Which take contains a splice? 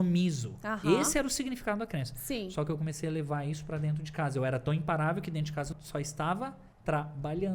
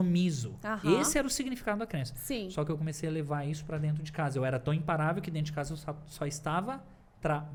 first; 2 cuts; at 5.8 s, 6.7 s

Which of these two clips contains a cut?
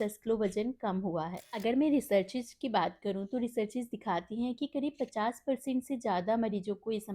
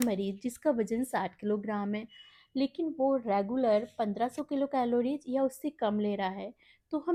first; 1 cut; at 1.4 s

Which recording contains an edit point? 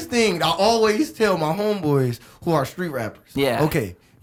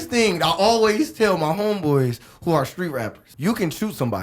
second; 1 cut; at 3.2 s

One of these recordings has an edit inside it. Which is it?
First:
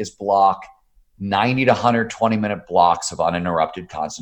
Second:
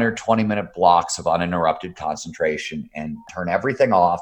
second; 1 cut; at 3.3 s

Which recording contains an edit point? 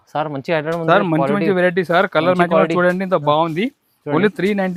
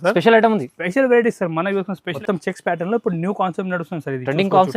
second; 1 cut; at 2.1 s

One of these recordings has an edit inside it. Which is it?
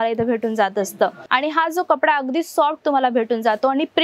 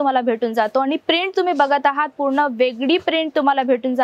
first; 1 cut; at 1.2 s

